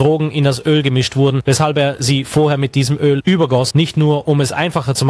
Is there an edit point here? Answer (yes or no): yes